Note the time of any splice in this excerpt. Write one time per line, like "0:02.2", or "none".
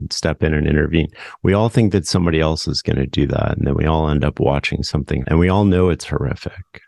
0:05.2